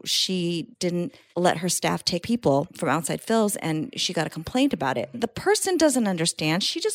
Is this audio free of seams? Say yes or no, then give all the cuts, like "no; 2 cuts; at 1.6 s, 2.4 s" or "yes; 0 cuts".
no; 3 cuts; at 1.0 s, 2.2 s, 5.3 s